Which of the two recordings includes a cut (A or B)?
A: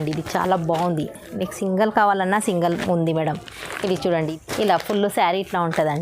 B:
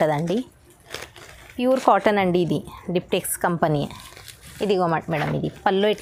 A